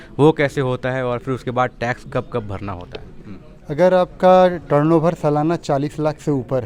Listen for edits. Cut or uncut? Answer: uncut